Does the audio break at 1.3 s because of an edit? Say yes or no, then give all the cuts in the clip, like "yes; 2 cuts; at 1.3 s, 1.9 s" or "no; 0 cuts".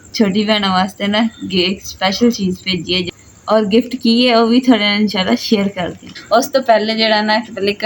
no; 2 cuts; at 3.1 s, 6.1 s